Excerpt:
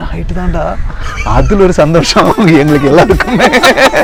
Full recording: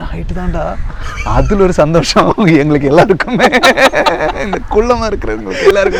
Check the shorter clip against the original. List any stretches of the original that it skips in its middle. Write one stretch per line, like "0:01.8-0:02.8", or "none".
none